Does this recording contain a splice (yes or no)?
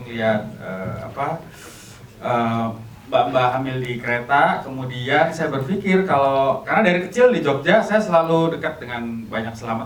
no